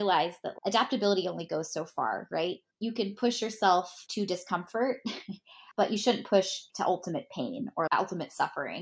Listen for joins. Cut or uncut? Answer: cut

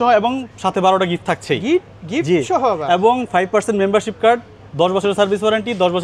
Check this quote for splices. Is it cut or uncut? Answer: uncut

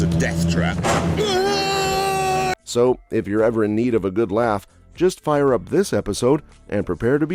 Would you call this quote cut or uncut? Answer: uncut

